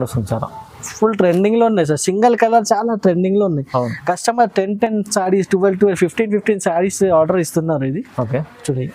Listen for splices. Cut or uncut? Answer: uncut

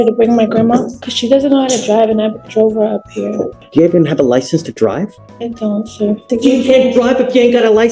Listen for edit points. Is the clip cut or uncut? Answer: cut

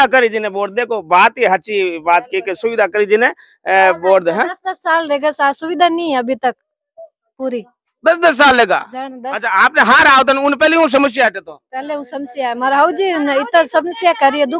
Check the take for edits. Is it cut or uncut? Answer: uncut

